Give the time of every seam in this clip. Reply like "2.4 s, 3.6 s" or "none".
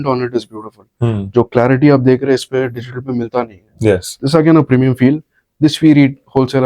none